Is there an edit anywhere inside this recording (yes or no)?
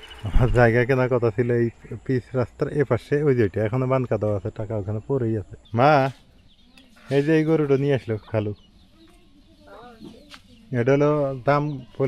yes